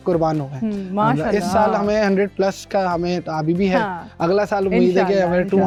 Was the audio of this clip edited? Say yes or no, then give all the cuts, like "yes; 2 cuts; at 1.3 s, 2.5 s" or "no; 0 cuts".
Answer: no; 0 cuts